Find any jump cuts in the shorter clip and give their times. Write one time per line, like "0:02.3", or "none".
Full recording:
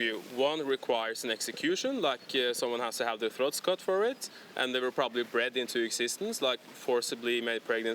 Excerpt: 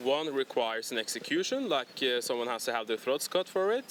none